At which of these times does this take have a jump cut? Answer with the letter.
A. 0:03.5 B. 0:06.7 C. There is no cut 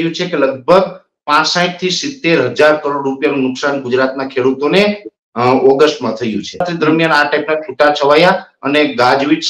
B